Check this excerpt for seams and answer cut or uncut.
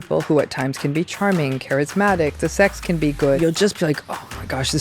cut